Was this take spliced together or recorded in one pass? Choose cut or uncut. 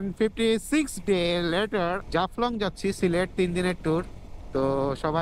cut